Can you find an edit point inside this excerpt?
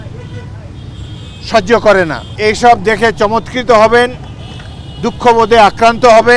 yes; 1 cut; at 2.2 s

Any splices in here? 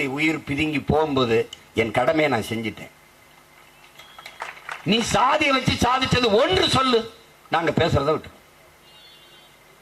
yes; 1 cut; at 4.4 s

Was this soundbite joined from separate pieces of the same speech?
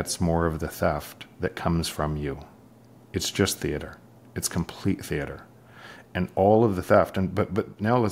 no; 0 cuts

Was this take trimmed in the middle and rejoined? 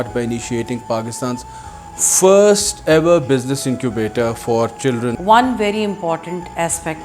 yes; 1 cut; at 5.2 s

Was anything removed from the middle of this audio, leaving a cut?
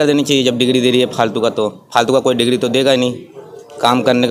no; 0 cuts

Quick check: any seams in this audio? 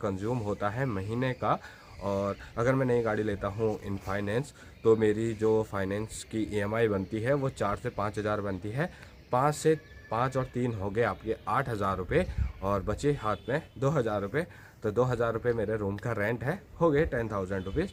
no; 0 cuts

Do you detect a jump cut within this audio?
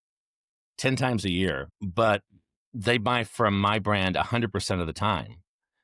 yes; 1 cut; at 1.8 s

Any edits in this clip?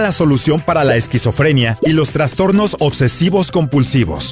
yes; 1 cut; at 2.3 s

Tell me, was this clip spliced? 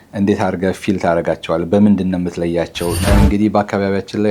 yes; 1 cut; at 3.0 s

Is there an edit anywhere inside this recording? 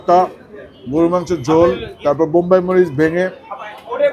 yes; 1 cut; at 1.9 s

